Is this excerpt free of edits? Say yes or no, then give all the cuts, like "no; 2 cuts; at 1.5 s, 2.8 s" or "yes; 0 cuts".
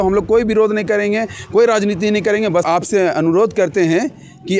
no; 1 cut; at 2.7 s